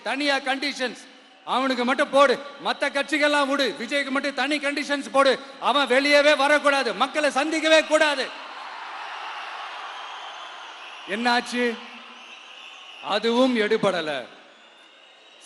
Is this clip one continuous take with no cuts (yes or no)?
yes